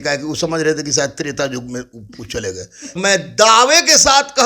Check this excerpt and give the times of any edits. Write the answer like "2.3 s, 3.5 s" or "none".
3.0 s